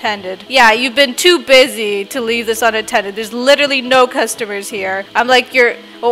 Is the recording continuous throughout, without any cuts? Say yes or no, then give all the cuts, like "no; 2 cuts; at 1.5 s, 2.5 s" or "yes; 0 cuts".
no; 1 cut; at 5.0 s